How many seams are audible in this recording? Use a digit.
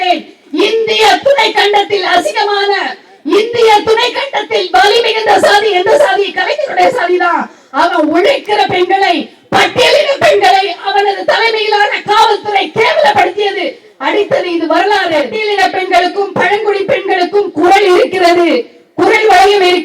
1